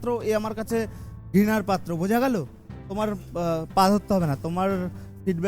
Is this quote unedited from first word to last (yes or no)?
no